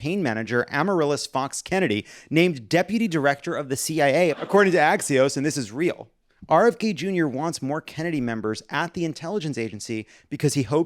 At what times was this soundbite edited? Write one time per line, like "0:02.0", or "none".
0:04.4